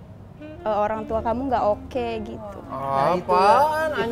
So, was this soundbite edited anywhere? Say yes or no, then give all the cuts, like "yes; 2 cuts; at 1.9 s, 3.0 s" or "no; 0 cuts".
no; 0 cuts